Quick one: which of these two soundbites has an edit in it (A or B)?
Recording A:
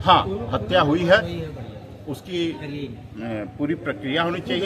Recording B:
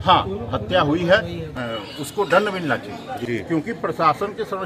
B